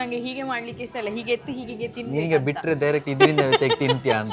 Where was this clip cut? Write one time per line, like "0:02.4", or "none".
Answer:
none